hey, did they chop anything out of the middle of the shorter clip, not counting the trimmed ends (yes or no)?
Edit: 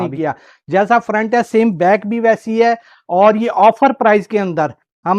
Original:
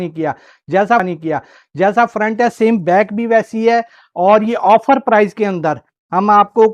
yes